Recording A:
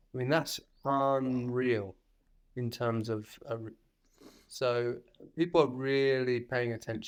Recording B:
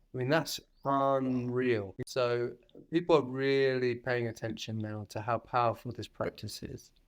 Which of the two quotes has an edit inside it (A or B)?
B